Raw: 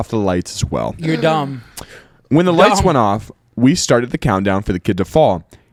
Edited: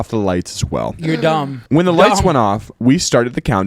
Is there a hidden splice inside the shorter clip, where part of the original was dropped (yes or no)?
yes